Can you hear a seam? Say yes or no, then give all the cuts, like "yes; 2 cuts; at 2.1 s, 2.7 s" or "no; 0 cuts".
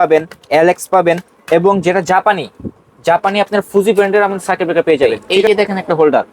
yes; 1 cut; at 5.3 s